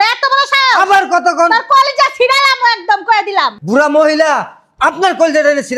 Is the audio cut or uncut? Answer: cut